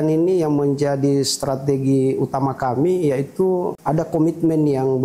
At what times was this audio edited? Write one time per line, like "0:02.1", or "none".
0:03.8